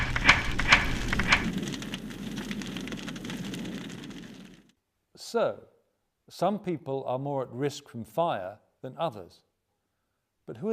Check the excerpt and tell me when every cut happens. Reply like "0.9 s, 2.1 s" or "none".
1.4 s